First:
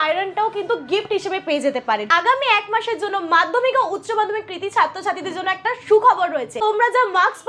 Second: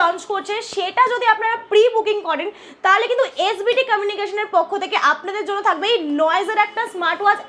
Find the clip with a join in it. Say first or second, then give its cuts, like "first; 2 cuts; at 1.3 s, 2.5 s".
first; 2 cuts; at 2.1 s, 6.6 s